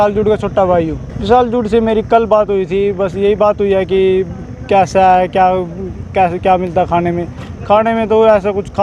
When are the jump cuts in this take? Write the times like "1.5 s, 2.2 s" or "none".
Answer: 1.1 s